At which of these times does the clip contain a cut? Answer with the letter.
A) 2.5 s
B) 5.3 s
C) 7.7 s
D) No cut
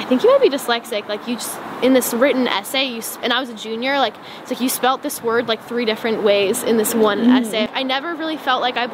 C